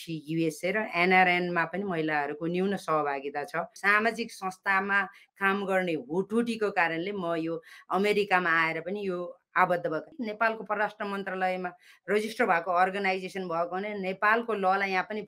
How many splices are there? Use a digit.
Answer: 2